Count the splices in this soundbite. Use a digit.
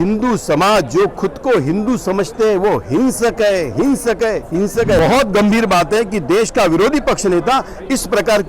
1